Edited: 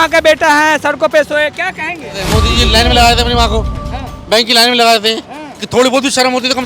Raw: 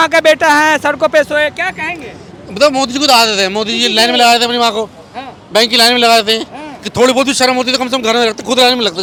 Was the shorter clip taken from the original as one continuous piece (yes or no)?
no